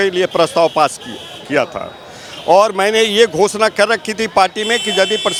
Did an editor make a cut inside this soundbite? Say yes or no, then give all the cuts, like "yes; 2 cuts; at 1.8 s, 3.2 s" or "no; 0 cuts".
no; 0 cuts